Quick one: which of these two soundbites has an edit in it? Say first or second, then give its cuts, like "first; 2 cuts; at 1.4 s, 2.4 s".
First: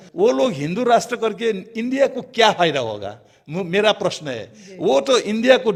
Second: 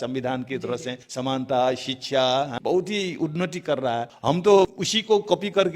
second; 4 cuts; at 1.0 s, 2.5 s, 4.1 s, 4.9 s